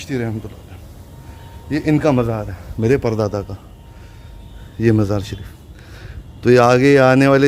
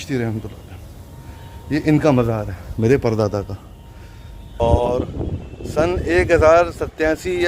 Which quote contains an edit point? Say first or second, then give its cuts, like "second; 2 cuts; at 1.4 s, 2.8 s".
second; 1 cut; at 4.5 s